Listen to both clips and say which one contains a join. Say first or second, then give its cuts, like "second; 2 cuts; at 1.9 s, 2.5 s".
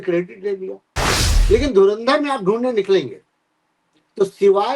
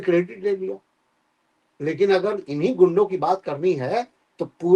first; 1 cut; at 1.3 s